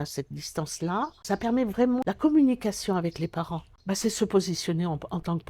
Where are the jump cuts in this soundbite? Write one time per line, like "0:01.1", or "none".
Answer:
none

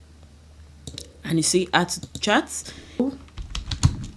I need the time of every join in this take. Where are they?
0:03.0

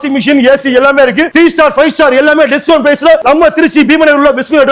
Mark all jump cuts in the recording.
0:01.3

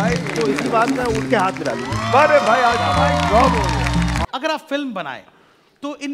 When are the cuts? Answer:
0:04.2

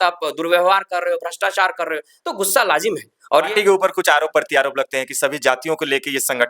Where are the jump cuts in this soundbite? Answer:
0:03.5

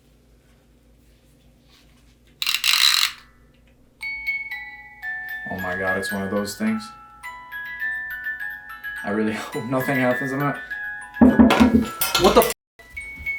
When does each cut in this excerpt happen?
none

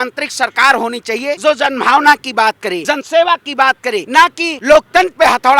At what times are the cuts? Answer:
0:01.4
0:02.8
0:04.2

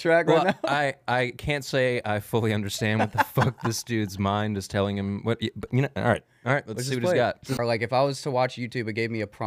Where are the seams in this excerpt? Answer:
0:07.6

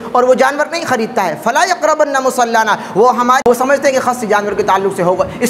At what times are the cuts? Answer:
0:03.4

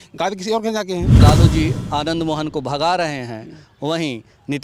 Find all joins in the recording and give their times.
0:01.2

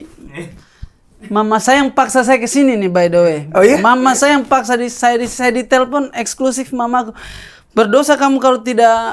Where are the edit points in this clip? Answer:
none

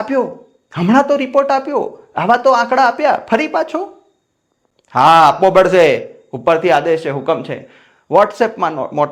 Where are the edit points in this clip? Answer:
none

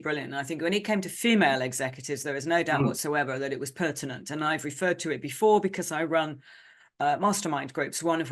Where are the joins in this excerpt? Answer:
none

